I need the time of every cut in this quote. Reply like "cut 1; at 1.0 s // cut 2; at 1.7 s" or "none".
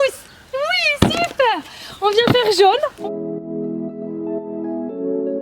cut 1; at 3.0 s